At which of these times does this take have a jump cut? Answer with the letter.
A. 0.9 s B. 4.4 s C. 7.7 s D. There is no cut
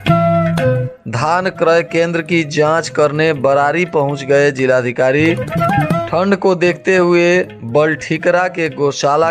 A